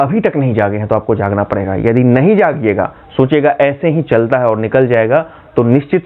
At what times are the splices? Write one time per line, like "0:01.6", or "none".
none